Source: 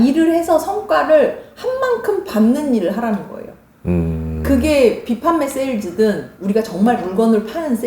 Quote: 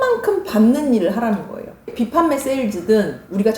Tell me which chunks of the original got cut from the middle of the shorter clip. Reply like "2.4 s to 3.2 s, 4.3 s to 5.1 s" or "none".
3.7 s to 5.0 s

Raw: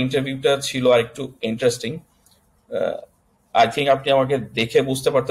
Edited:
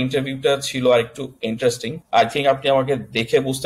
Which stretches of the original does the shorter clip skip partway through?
1.9 s to 3.3 s

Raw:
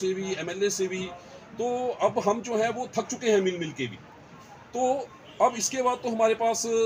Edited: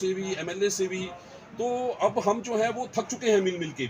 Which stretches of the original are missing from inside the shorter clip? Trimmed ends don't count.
none

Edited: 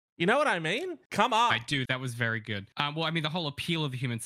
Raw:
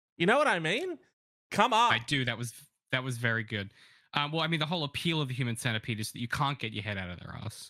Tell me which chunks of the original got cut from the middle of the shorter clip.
1.0 s to 1.4 s, 2.3 s to 2.9 s, 3.7 s to 4.0 s

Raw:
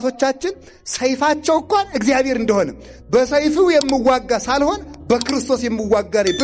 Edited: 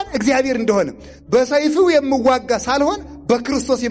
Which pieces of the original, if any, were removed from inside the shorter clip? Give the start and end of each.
none

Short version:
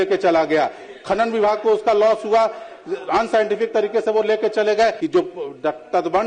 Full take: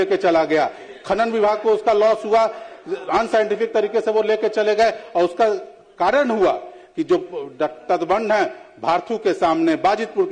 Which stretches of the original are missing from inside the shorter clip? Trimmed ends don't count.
5.0 s to 7.0 s

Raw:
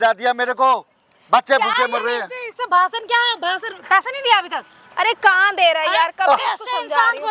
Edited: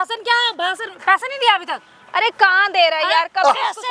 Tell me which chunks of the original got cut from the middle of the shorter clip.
none

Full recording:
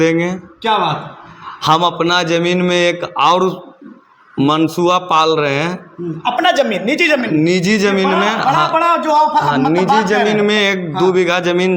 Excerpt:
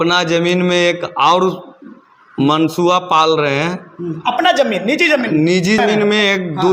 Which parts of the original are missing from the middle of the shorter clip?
7.8 s to 10.2 s

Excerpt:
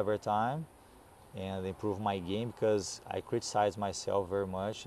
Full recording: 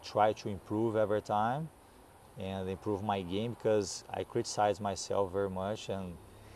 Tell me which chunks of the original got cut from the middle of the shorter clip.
none

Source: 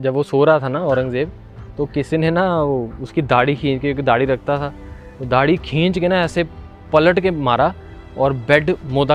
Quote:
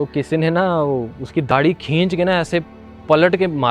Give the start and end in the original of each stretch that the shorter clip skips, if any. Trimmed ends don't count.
3.3 s to 5.3 s

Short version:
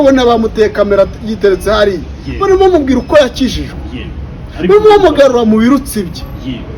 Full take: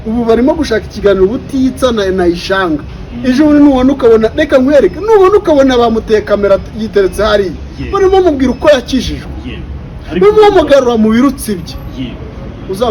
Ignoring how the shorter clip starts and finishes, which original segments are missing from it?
none

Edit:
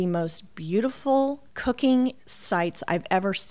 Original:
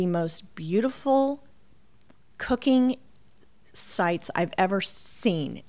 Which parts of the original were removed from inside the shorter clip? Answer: 1.5 s to 2.3 s, 3.1 s to 3.8 s

